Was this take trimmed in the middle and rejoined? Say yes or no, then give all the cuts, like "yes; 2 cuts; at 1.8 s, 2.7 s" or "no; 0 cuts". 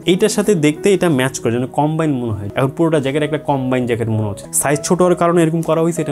yes; 2 cuts; at 2.4 s, 4.4 s